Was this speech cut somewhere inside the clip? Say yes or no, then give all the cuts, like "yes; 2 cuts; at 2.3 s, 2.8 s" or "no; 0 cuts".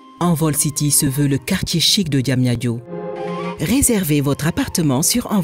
no; 0 cuts